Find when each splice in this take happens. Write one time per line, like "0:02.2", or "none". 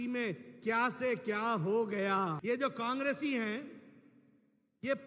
0:02.4